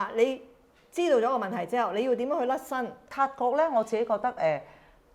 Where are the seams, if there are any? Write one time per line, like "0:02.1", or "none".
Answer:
0:03.1